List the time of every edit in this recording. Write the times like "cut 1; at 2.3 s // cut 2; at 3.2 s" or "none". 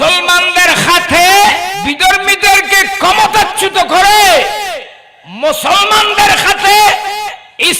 cut 1; at 1.8 s